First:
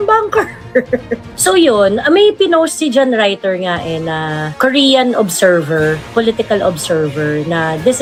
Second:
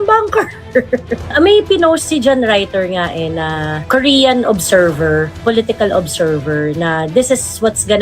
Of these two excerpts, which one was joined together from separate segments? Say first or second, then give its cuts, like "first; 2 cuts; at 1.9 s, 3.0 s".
second; 1 cut; at 1.3 s